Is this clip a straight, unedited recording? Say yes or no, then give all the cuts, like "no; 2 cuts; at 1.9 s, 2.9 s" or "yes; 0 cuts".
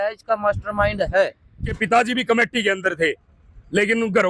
no; 1 cut; at 1.8 s